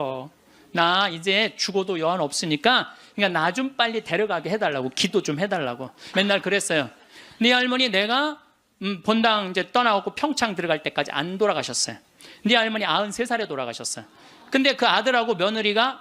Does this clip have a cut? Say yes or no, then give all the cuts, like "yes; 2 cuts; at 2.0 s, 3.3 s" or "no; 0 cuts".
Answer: yes; 2 cuts; at 3.0 s, 6.0 s